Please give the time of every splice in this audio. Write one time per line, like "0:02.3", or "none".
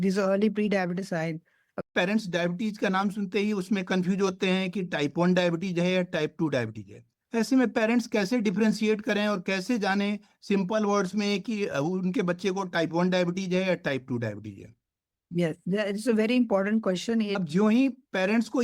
0:01.9
0:17.3

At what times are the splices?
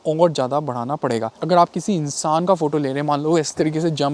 0:01.4

